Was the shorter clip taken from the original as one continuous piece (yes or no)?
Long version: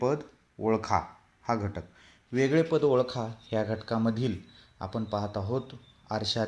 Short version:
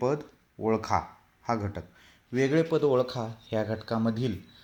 yes